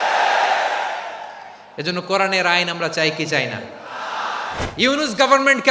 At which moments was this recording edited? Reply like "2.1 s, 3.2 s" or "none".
4.6 s